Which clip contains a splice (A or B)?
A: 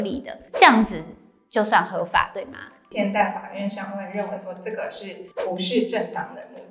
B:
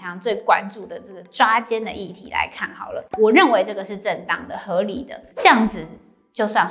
B